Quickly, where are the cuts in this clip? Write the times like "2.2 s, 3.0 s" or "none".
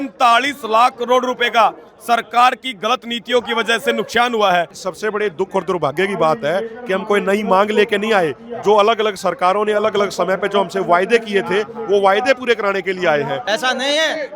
4.8 s, 13.4 s